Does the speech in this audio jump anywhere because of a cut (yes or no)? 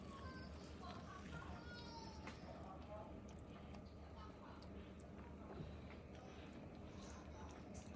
no